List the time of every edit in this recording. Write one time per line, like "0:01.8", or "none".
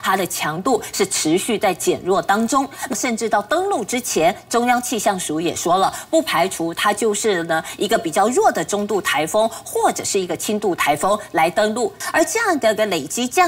0:02.9
0:12.0